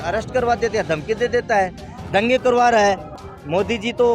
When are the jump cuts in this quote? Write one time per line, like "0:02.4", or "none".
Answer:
0:03.2